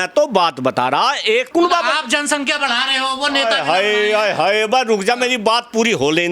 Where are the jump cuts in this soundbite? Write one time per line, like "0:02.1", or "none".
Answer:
0:01.5